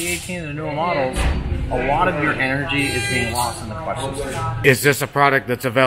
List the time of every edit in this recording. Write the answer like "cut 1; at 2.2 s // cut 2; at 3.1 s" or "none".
cut 1; at 4.6 s

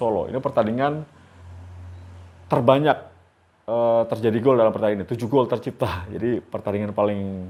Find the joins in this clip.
none

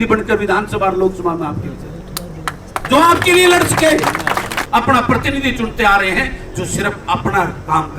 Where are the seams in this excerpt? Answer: cut 1; at 4.6 s

